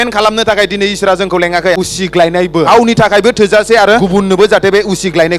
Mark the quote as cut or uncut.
cut